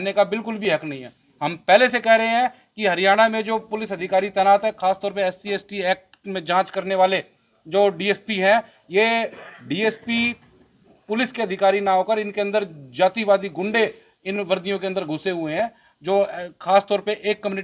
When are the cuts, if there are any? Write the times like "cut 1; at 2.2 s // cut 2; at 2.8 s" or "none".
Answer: none